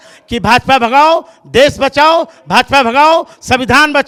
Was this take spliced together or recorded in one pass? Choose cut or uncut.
uncut